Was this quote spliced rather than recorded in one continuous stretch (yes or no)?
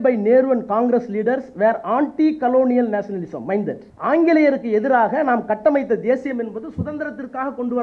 yes